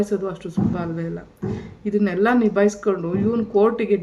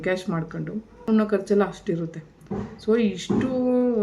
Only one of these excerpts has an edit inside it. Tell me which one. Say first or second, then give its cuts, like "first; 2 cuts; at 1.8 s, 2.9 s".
second; 1 cut; at 1.1 s